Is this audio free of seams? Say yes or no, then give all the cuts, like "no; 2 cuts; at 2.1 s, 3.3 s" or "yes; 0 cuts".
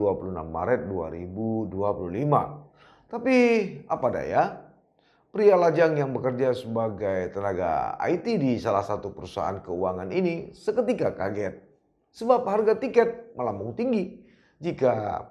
yes; 0 cuts